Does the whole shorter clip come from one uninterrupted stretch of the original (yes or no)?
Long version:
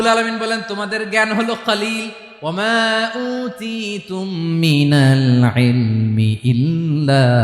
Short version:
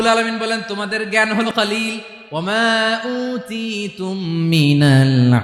no